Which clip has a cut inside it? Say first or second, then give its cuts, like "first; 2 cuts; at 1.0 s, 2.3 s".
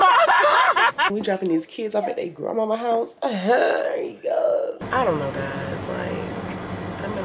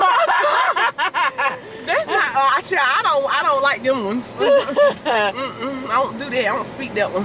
first; 2 cuts; at 1.1 s, 4.8 s